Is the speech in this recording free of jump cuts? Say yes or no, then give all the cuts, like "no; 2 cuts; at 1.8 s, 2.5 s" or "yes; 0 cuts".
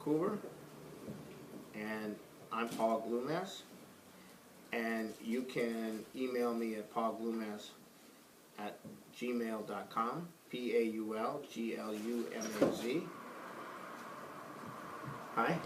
yes; 0 cuts